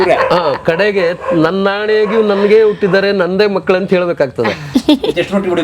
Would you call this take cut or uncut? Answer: cut